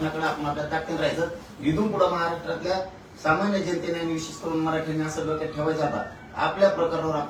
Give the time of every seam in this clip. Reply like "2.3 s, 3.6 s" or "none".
none

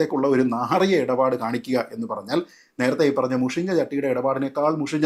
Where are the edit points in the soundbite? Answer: none

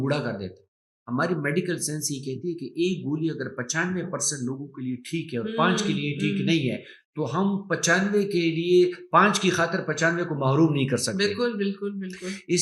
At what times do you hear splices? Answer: 0.9 s

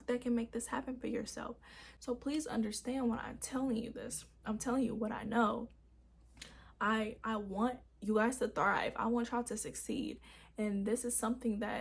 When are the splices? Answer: none

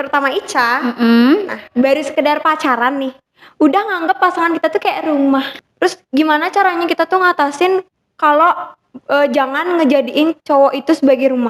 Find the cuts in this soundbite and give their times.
5.6 s

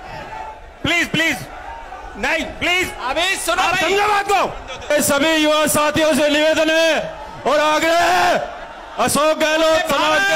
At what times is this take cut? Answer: 4.9 s

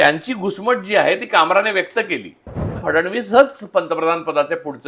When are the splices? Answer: 2.8 s

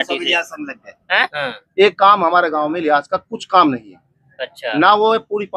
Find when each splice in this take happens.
1.3 s

